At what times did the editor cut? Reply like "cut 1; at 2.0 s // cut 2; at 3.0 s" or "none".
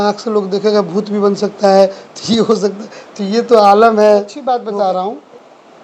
cut 1; at 4.4 s